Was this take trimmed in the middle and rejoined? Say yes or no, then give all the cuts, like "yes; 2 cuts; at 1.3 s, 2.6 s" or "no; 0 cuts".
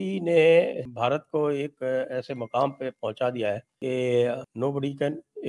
yes; 3 cuts; at 0.9 s, 3.7 s, 4.5 s